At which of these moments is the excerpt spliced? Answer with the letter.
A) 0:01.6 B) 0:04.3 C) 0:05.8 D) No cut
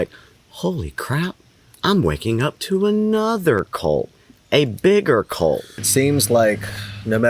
C